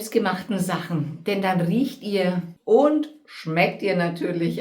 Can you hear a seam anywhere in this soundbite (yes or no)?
yes